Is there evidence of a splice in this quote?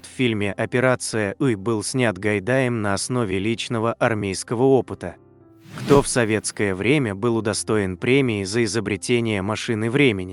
yes; 1 cut; at 5.1 s

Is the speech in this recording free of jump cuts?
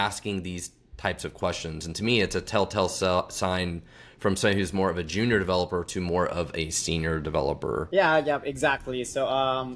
no; 1 cut; at 7.9 s

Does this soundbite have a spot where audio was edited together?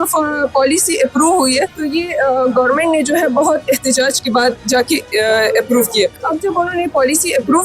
yes; 2 cuts; at 1.8 s, 6.2 s

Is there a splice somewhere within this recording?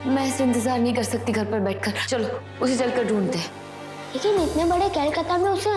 no; 0 cuts

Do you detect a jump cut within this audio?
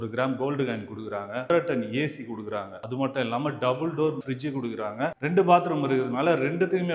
no; 0 cuts

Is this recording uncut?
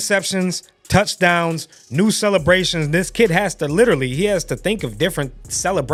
yes; 0 cuts

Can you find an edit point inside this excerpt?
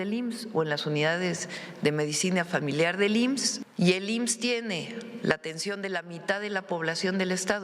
yes; 1 cut; at 3.6 s

